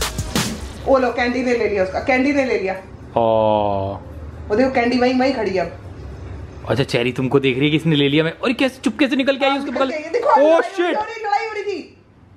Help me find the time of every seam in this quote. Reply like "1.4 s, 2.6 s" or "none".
none

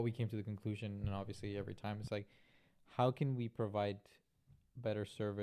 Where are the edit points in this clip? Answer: none

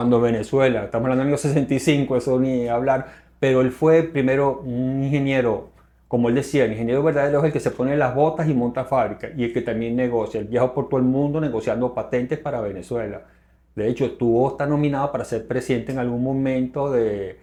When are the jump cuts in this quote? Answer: none

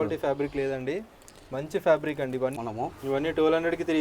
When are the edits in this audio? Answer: 2.6 s

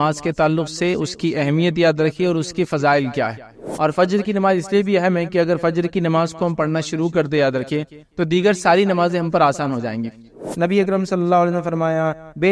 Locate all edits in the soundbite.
3.6 s, 10.4 s

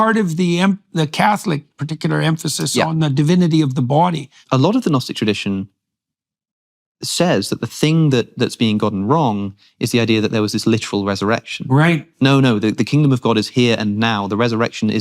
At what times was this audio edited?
4.4 s

